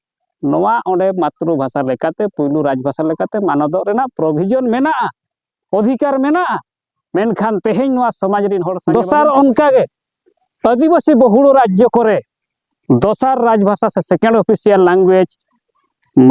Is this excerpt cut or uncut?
cut